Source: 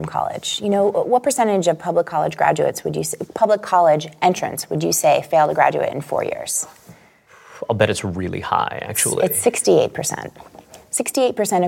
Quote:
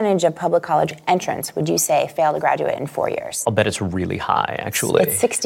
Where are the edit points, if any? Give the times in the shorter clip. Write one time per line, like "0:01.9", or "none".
0:00.9
0:03.3